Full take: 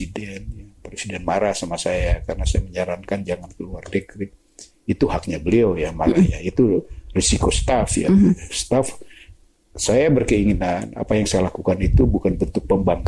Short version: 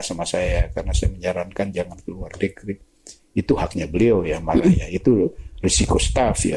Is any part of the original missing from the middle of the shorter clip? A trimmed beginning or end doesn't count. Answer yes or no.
no